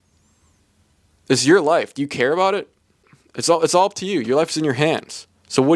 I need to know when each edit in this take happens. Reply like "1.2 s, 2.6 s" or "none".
3.1 s